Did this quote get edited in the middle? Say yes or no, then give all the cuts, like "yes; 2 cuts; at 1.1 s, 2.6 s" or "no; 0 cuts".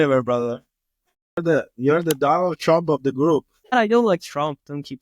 yes; 1 cut; at 1.4 s